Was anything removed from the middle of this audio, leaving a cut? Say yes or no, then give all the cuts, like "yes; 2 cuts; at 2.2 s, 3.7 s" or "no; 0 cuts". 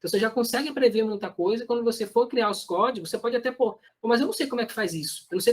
yes; 1 cut; at 3.9 s